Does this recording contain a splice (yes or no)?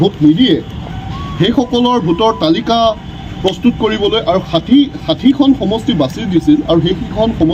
no